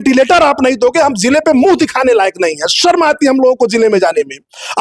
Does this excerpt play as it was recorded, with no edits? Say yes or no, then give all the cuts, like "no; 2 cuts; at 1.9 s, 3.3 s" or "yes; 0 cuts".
yes; 0 cuts